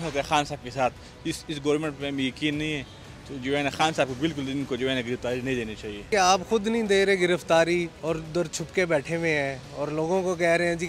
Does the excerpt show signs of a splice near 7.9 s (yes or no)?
yes